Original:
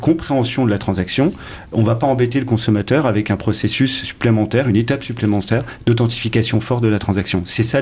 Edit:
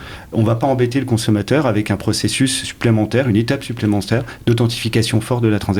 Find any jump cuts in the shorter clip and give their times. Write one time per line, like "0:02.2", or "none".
none